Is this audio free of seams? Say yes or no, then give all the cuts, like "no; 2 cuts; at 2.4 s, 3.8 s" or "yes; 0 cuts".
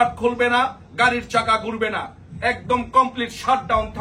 yes; 0 cuts